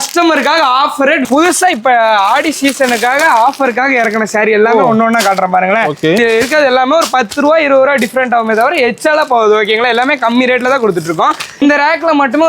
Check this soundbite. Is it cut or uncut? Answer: cut